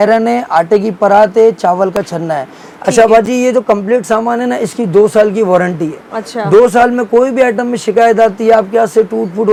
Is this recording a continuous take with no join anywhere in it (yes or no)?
yes